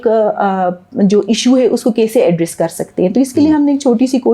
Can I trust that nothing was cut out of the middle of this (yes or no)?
yes